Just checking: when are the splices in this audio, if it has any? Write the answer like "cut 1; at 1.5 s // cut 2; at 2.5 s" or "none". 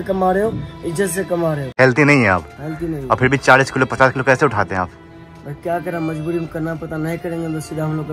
cut 1; at 1.6 s